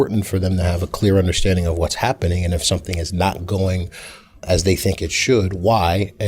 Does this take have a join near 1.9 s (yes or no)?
no